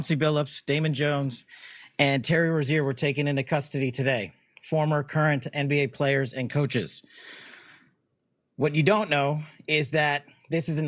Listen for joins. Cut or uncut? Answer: uncut